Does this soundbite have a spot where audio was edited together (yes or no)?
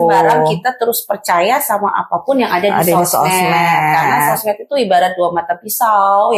no